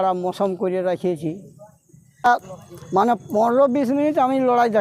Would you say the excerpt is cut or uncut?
cut